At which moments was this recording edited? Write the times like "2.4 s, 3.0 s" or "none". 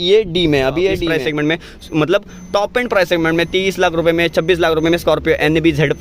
1.1 s